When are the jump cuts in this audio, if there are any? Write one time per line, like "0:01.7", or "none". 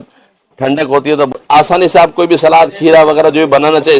0:01.3